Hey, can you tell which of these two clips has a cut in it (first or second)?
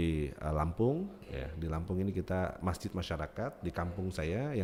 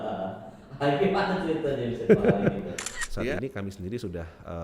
second